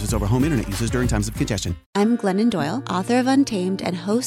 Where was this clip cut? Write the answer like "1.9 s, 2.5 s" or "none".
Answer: 1.8 s